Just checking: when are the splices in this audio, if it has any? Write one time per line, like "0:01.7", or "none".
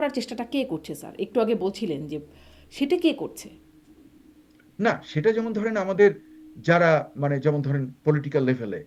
none